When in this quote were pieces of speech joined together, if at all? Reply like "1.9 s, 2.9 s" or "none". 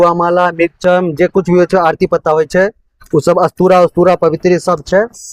none